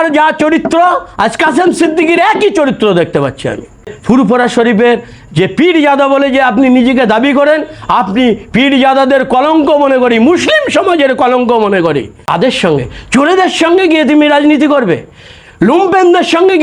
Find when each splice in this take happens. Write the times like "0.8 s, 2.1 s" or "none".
3.9 s, 12.2 s